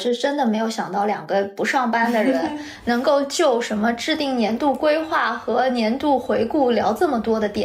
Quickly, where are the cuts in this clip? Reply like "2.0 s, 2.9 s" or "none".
none